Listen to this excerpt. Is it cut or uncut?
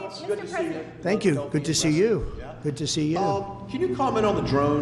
uncut